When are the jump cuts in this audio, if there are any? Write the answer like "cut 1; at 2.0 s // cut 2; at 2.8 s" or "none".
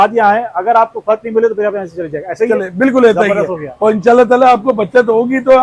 none

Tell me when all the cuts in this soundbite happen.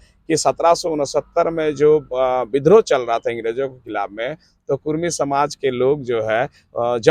none

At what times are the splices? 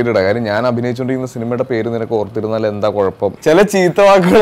cut 1; at 3.4 s

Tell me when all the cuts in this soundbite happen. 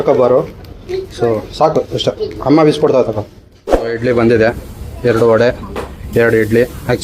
cut 1; at 4.0 s

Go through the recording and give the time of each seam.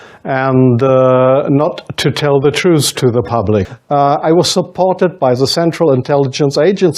cut 1; at 3.8 s

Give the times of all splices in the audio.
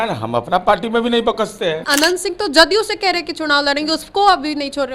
cut 1; at 1.8 s

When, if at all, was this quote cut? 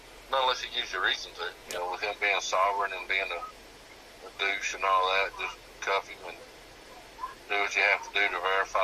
cut 1; at 1.6 s

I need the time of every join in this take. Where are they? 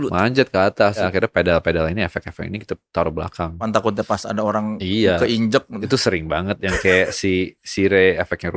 cut 1; at 1.0 s // cut 2; at 3.6 s

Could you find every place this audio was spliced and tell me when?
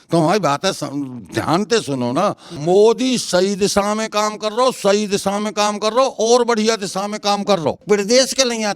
cut 1; at 2.5 s // cut 2; at 7.8 s

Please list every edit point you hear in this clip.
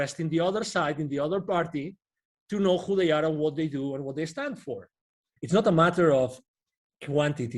cut 1; at 5.3 s

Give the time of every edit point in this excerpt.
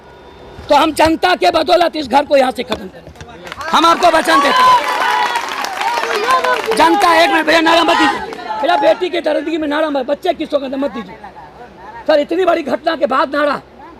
none

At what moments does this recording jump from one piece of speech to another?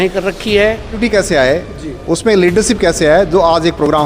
cut 1; at 1.0 s

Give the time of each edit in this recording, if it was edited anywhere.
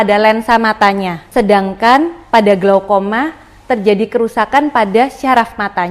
cut 1; at 1.2 s

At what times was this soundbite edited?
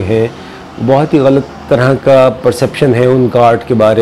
none

